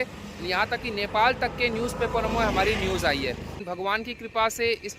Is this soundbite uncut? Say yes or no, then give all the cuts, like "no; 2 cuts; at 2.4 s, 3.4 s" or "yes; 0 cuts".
no; 1 cut; at 3.5 s